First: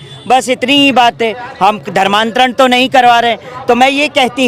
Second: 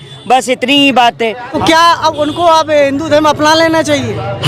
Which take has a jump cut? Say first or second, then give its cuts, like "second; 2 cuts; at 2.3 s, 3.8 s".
second; 1 cut; at 1.5 s